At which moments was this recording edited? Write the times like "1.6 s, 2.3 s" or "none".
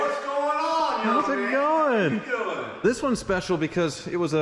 2.8 s